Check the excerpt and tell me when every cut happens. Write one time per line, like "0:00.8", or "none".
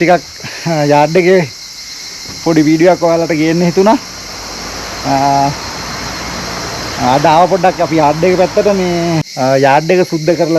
0:09.2